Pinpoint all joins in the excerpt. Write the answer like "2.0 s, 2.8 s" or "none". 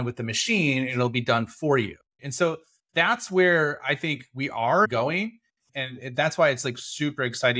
4.9 s